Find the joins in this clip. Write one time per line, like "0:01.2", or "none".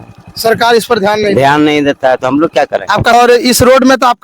0:03.1